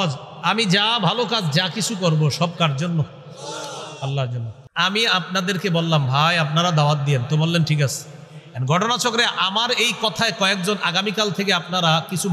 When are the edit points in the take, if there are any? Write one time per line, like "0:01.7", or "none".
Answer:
0:04.7